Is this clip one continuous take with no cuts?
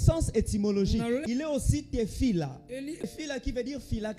no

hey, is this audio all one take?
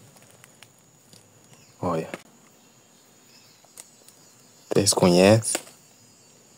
no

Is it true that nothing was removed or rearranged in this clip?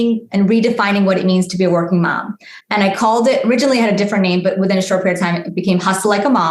yes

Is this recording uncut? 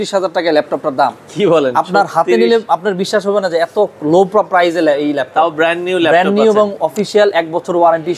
yes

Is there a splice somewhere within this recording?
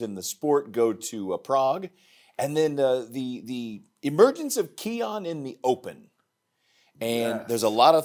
no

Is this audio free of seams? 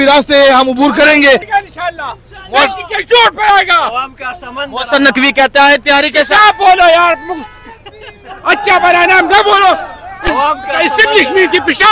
no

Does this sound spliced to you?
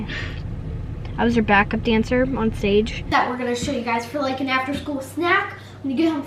yes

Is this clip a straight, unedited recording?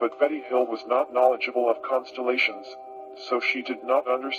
yes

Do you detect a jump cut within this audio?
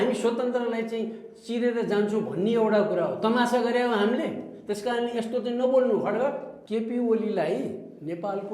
yes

